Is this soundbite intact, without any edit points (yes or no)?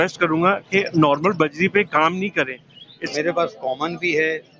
no